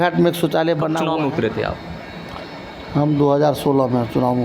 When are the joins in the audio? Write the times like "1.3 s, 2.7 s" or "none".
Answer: 1.0 s